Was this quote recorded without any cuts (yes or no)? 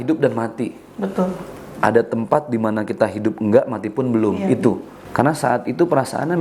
no